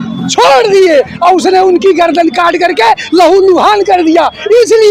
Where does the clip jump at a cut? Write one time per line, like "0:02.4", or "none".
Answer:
none